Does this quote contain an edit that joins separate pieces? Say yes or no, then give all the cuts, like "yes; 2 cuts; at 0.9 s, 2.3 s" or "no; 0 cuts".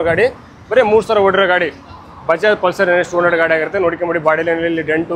no; 0 cuts